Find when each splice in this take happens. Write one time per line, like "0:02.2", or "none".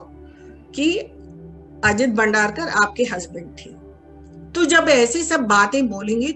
none